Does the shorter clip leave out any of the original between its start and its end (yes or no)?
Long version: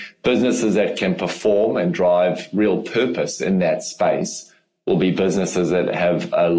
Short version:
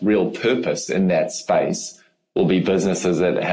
no